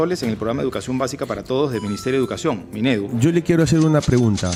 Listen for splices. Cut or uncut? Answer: uncut